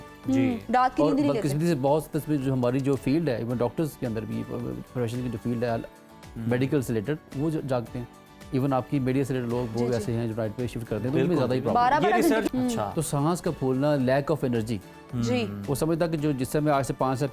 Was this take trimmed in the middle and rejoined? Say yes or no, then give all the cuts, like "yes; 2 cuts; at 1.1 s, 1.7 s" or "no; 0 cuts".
yes; 1 cut; at 12.4 s